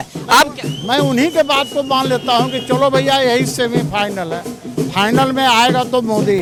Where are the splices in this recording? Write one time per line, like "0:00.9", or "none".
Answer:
none